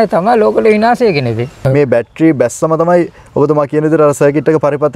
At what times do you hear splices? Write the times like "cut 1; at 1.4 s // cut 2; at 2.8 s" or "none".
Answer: cut 1; at 1.6 s